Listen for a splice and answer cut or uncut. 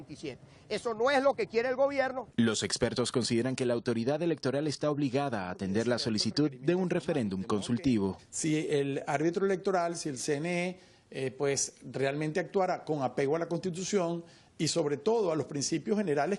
uncut